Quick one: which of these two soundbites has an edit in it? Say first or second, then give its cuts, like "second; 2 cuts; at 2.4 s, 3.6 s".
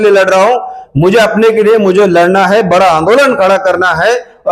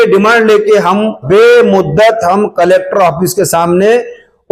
second; 1 cut; at 1.2 s